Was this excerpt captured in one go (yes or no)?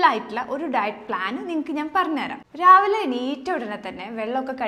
yes